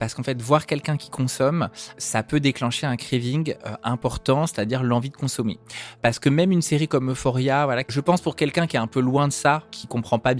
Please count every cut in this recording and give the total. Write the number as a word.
three